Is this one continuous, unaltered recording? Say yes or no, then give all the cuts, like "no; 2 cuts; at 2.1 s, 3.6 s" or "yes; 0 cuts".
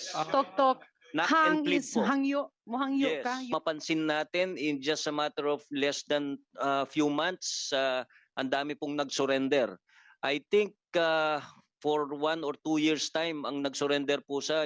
no; 1 cut; at 3.5 s